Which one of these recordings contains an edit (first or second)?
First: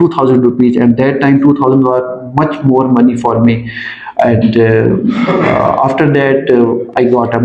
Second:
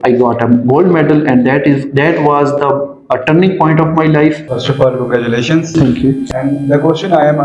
second